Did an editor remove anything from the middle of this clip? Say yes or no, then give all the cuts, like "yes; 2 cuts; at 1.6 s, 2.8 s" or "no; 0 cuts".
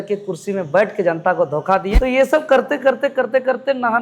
yes; 1 cut; at 1.9 s